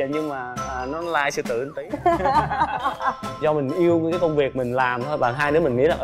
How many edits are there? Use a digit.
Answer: 1